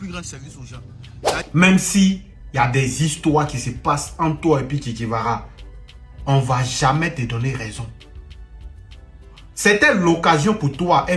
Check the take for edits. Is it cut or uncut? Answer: cut